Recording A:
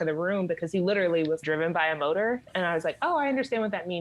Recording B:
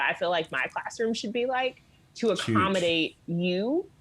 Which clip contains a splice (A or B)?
A